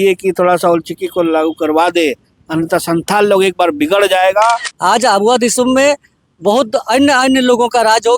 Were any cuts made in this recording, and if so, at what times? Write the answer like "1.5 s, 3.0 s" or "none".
4.7 s